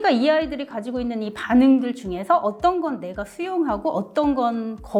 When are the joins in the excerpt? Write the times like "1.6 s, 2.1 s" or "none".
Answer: none

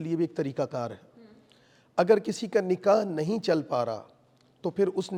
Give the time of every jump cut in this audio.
none

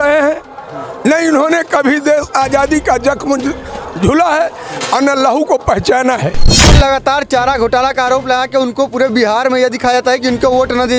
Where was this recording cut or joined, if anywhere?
6.7 s

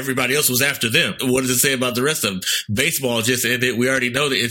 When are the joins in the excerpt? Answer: 1.1 s

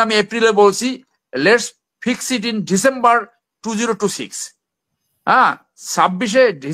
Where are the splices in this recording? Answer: none

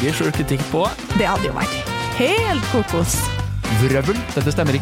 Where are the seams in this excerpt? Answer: none

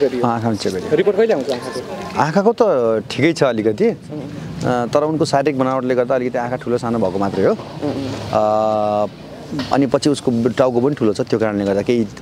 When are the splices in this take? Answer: none

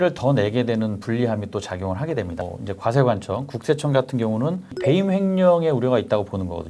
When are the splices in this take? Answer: 2.4 s, 4.7 s

